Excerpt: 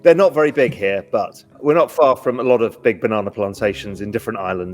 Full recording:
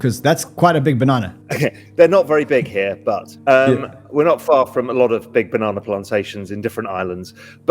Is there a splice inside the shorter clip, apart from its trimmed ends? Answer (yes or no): yes